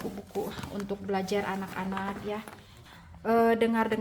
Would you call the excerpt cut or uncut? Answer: cut